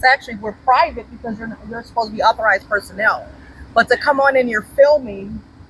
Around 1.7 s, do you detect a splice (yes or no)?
no